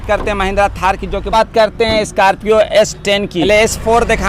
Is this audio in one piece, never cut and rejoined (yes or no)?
no